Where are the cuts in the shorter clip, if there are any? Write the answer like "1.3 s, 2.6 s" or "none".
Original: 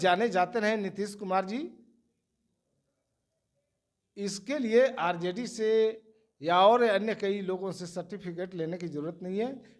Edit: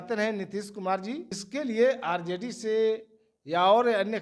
1.4 s